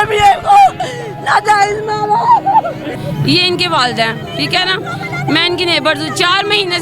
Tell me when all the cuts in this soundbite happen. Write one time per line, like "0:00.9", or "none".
none